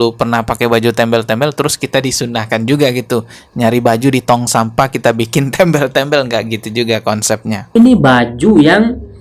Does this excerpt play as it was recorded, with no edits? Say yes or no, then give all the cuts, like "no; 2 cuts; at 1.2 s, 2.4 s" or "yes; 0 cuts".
no; 1 cut; at 7.8 s